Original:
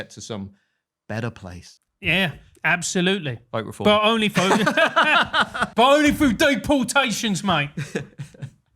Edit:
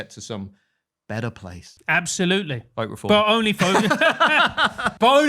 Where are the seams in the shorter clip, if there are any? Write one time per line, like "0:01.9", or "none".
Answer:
0:01.7